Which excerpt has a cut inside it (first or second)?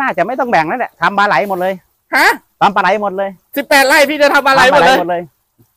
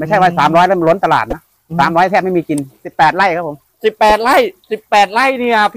second